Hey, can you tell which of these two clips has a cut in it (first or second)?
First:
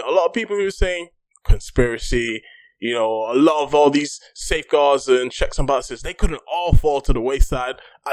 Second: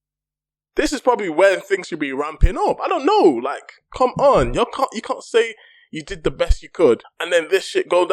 second